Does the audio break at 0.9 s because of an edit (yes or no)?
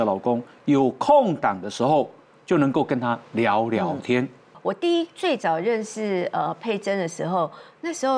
no